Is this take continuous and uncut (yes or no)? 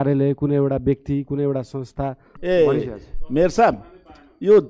no